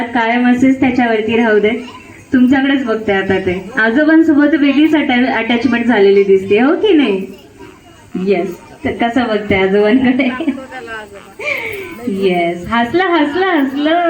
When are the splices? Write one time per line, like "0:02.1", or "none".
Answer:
none